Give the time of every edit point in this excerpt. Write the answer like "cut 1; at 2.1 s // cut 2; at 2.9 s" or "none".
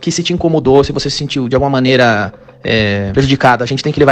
cut 1; at 3.1 s